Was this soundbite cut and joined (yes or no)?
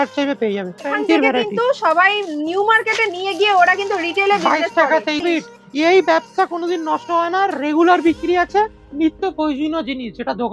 yes